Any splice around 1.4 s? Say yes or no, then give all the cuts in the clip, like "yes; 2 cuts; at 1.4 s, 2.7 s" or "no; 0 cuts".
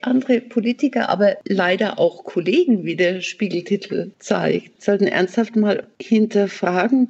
yes; 3 cuts; at 1.4 s, 4.4 s, 5.9 s